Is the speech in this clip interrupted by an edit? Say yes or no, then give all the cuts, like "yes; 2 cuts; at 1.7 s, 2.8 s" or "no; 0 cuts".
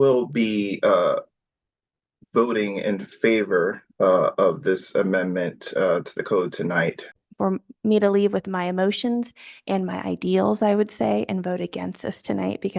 yes; 1 cut; at 7.1 s